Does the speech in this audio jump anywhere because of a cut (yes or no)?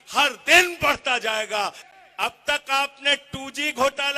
yes